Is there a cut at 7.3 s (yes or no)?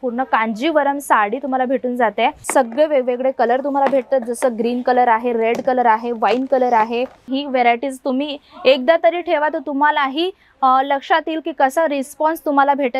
yes